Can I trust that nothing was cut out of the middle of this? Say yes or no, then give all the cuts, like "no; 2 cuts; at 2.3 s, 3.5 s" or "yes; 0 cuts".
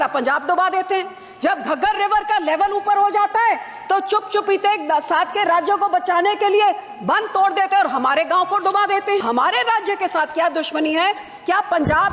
no; 1 cut; at 9.2 s